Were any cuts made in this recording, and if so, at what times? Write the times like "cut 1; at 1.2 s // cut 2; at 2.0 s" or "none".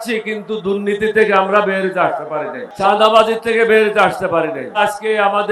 cut 1; at 2.6 s // cut 2; at 4.8 s